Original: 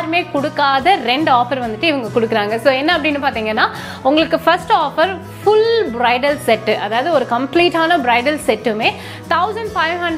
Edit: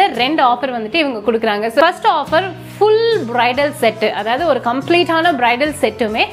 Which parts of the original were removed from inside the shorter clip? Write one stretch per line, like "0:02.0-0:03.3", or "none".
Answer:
0:02.7-0:04.5